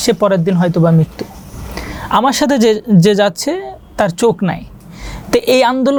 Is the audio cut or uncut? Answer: uncut